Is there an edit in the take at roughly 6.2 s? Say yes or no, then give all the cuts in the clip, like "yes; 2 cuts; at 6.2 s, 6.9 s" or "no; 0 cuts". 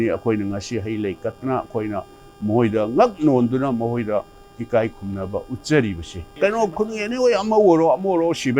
yes; 1 cut; at 6.2 s